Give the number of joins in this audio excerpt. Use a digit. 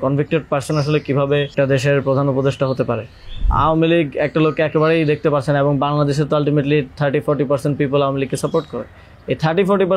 2